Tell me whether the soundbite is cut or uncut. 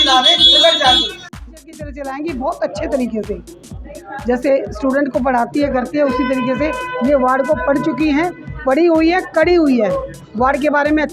cut